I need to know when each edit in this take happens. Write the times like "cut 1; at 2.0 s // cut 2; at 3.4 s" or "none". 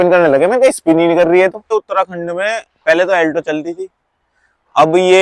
cut 1; at 1.6 s